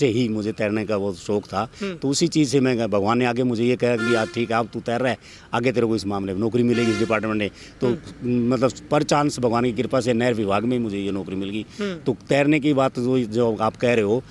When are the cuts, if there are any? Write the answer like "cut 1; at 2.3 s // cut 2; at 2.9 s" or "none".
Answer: none